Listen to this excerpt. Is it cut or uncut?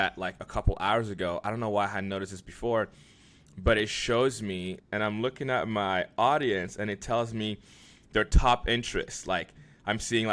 cut